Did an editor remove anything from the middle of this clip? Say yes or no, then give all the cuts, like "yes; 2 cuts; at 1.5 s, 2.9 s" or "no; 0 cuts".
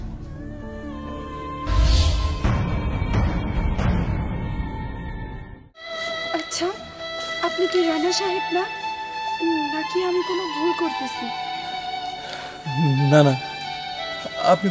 yes; 1 cut; at 5.9 s